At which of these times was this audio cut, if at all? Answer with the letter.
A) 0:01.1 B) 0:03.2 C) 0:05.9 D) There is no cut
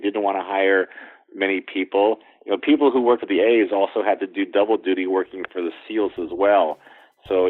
B